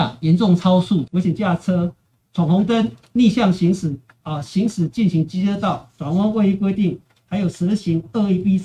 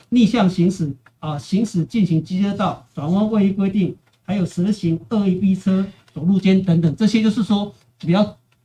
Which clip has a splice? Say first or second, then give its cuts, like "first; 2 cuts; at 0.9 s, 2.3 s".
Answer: first; 1 cut; at 1.0 s